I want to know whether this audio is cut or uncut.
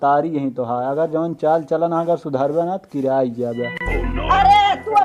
uncut